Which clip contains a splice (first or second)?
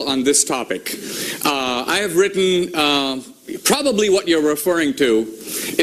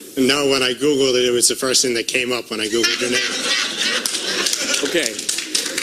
first